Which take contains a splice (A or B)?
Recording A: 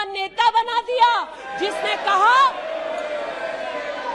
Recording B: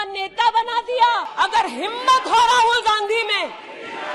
B